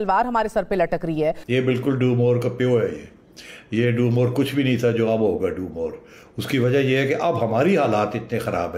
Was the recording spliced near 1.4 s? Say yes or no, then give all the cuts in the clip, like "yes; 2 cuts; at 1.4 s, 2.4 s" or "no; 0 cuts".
yes; 1 cut; at 1.4 s